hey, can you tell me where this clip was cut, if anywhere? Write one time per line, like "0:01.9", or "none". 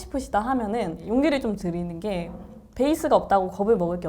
0:01.0

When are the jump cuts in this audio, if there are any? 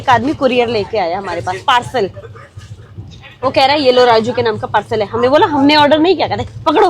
none

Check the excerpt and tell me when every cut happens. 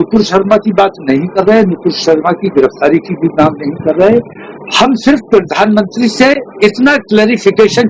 none

